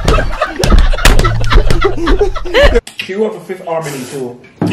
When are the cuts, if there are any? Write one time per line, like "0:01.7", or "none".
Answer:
0:03.0